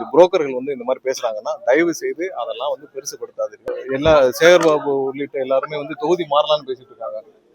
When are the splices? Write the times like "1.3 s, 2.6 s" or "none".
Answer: 3.8 s